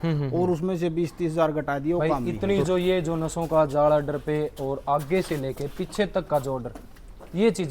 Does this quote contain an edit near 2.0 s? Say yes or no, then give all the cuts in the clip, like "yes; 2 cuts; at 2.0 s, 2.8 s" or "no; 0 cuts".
yes; 1 cut; at 2.0 s